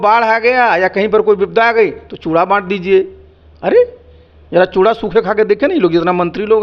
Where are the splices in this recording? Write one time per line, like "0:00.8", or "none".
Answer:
none